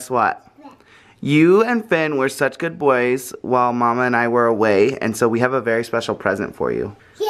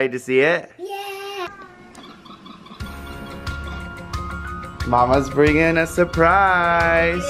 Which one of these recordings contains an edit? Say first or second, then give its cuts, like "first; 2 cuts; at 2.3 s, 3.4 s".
second; 1 cut; at 1.5 s